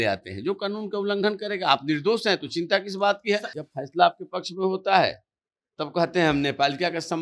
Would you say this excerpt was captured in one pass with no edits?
no; 1 cut; at 3.5 s

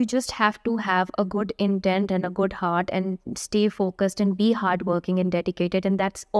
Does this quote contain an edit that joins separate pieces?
no; 0 cuts

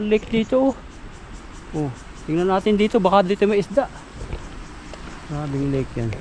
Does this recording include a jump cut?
no; 0 cuts

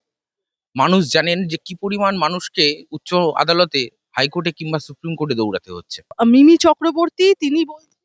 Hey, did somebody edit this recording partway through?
no; 0 cuts

